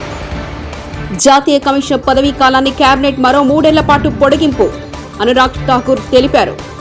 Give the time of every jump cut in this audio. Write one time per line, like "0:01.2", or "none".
0:00.9